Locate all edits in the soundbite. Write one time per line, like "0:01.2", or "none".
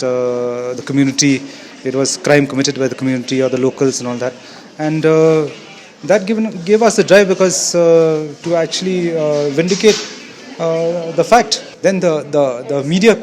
0:11.6